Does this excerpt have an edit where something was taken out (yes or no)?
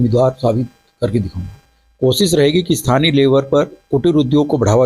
yes